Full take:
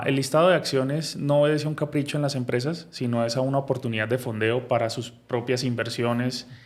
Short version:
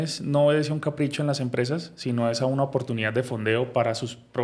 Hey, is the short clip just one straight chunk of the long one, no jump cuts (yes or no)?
yes